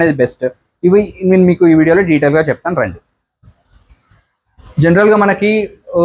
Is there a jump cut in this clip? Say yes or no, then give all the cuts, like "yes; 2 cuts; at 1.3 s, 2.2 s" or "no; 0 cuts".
no; 0 cuts